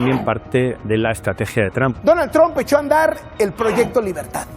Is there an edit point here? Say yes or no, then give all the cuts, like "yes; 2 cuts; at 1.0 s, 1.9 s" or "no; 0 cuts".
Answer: yes; 1 cut; at 1.9 s